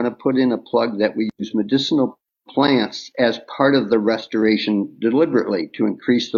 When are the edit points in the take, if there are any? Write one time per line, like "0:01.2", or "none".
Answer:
none